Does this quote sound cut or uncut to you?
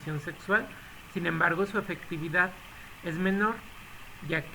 cut